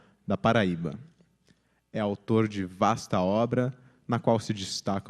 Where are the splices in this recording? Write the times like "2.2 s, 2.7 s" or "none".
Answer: 2.1 s